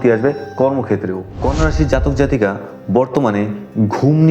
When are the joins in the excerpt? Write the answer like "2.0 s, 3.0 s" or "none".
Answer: 1.3 s